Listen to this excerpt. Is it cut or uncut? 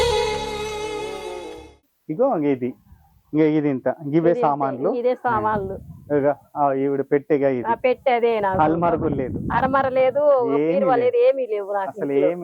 cut